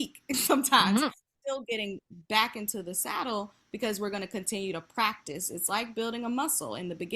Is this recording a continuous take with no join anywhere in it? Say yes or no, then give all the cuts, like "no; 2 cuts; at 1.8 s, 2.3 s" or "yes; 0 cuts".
no; 1 cut; at 1.3 s